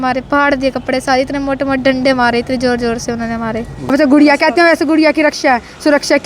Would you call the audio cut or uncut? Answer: cut